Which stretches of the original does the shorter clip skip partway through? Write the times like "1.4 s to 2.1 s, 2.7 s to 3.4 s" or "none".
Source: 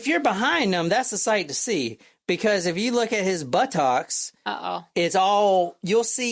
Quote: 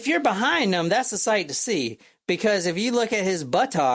none